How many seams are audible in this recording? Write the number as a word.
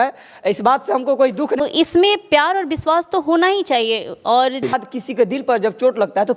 two